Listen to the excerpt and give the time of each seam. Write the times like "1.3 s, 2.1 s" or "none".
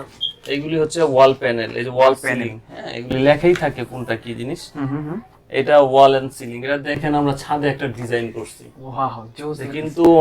none